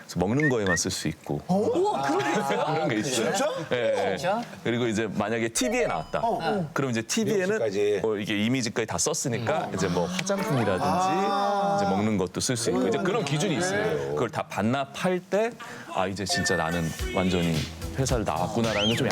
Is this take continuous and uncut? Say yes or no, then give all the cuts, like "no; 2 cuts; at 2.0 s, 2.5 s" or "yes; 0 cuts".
no; 1 cut; at 13.9 s